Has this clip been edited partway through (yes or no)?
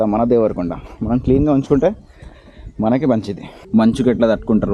yes